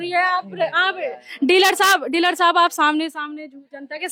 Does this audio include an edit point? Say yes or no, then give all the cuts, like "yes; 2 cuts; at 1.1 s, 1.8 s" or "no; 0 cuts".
no; 0 cuts